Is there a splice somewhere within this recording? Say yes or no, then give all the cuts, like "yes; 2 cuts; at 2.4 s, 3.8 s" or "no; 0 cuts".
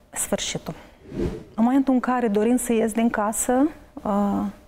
yes; 1 cut; at 1.4 s